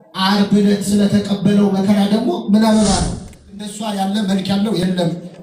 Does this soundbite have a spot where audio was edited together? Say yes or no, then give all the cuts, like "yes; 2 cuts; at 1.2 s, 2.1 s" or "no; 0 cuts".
yes; 1 cut; at 3.6 s